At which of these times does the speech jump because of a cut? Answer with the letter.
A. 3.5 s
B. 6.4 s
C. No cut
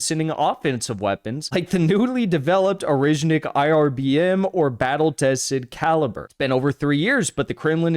B